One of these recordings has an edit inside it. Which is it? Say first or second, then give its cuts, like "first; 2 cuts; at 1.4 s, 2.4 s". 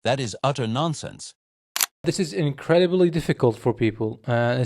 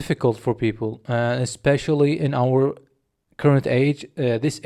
first; 1 cut; at 2.0 s